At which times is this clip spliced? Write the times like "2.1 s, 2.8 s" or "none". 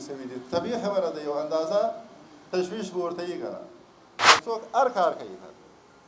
4.3 s